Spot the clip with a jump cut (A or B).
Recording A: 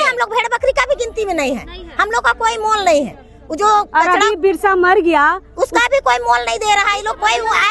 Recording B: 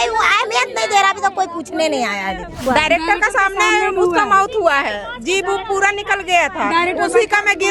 B